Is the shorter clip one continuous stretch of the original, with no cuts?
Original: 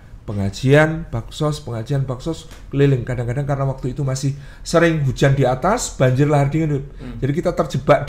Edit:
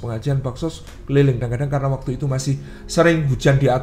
no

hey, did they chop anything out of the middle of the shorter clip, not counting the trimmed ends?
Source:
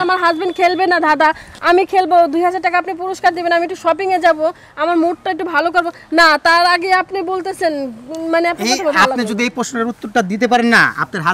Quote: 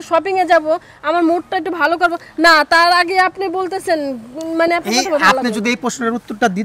no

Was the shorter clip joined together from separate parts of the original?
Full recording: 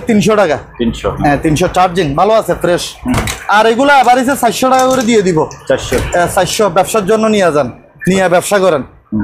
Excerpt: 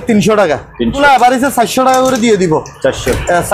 yes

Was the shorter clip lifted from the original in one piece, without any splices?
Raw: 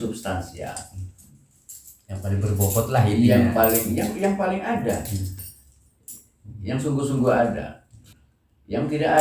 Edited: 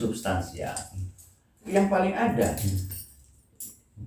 no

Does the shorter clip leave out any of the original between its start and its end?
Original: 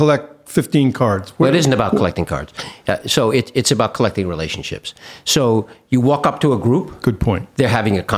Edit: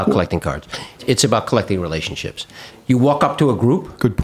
yes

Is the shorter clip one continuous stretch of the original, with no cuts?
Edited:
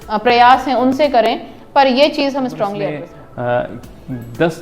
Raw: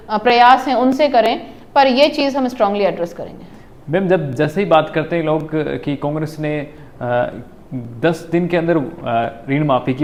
no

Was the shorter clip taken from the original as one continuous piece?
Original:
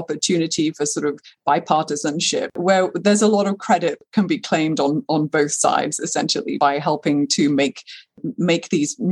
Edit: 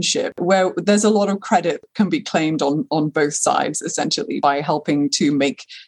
yes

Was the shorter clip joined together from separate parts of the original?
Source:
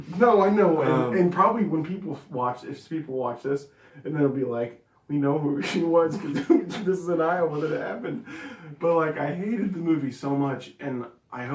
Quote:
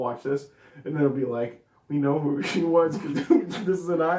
no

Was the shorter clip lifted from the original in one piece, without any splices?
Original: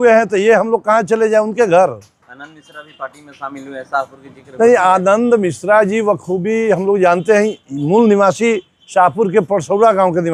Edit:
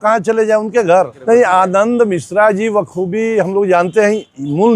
no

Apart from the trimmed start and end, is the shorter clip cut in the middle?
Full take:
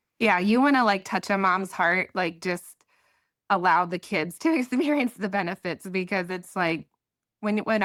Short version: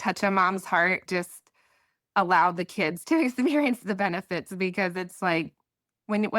yes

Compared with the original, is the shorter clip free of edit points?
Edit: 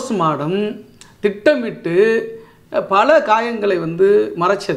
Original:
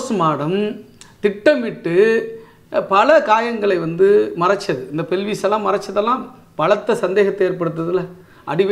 yes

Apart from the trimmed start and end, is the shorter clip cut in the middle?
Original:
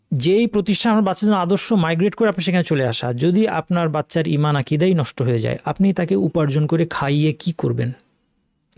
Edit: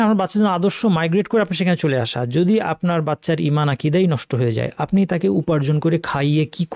no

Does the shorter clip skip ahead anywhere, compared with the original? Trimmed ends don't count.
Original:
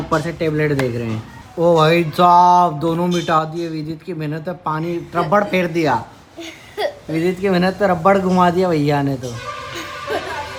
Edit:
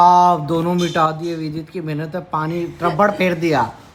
no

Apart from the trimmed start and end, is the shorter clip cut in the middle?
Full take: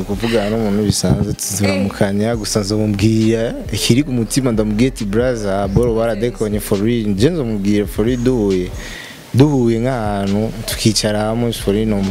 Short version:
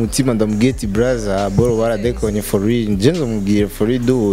no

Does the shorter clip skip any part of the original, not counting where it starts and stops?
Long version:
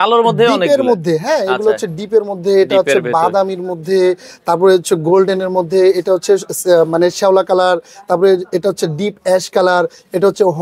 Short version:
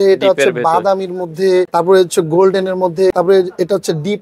yes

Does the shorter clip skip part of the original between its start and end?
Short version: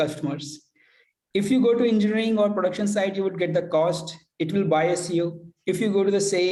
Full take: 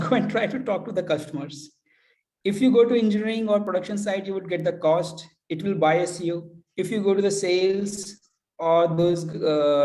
no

